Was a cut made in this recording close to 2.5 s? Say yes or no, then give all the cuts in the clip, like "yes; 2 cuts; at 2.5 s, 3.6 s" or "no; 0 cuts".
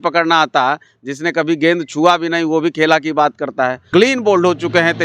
no; 1 cut; at 3.8 s